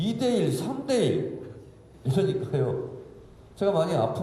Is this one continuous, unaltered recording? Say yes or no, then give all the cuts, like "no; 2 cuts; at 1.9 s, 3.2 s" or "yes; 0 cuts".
yes; 0 cuts